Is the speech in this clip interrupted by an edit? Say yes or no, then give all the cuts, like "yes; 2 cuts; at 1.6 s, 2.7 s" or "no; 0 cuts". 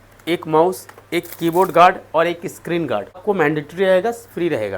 yes; 1 cut; at 3.2 s